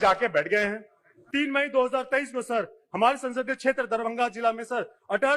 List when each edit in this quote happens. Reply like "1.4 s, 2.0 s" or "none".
1.1 s